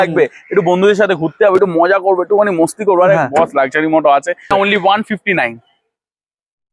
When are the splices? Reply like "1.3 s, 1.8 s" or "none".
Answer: 4.5 s